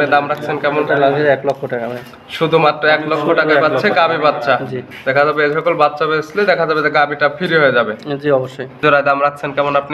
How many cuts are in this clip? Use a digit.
1